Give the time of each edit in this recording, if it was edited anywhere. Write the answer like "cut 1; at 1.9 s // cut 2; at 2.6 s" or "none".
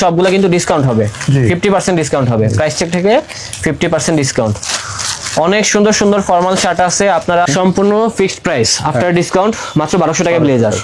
cut 1; at 7.5 s